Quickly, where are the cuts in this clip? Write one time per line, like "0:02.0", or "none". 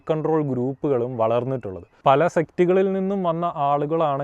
0:01.9